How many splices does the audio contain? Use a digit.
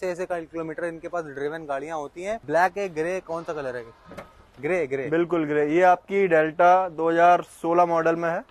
0